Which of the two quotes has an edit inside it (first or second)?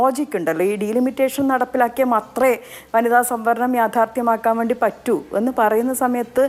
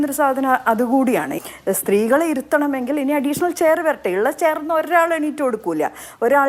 second